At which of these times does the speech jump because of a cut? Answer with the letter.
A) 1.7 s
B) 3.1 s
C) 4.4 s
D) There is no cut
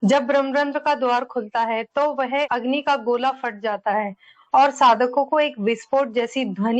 D